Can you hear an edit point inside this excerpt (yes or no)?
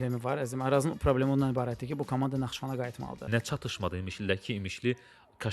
yes